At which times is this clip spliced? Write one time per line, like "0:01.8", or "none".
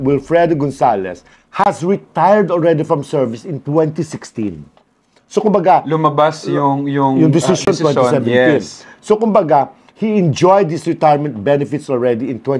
none